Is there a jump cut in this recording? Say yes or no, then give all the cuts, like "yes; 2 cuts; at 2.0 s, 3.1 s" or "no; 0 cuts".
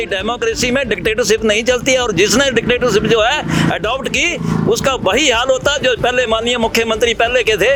no; 0 cuts